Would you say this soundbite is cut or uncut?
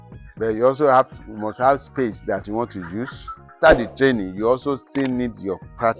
cut